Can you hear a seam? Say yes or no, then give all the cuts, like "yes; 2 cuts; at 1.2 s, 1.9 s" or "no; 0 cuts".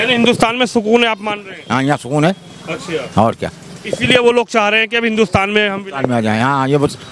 no; 0 cuts